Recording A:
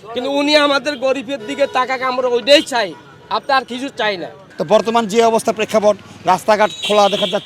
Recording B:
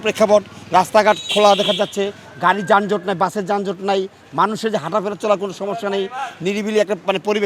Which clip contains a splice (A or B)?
A